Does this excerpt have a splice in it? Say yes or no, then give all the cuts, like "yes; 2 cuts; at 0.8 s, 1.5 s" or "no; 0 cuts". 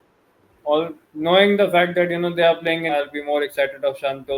yes; 1 cut; at 2.9 s